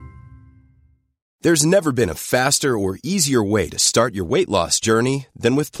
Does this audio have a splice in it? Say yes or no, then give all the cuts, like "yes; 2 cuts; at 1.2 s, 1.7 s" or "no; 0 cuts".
yes; 1 cut; at 1.2 s